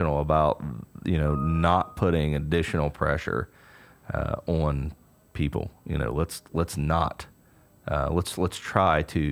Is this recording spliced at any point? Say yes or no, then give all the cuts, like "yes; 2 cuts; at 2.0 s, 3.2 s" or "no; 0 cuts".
no; 0 cuts